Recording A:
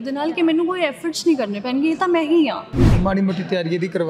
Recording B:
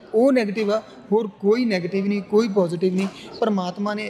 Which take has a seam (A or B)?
A